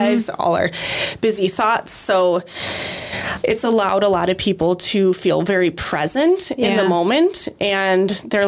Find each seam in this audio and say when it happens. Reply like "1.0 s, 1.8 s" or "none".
none